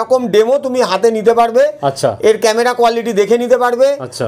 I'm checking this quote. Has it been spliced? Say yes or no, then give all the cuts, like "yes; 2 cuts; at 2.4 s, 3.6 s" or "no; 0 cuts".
no; 0 cuts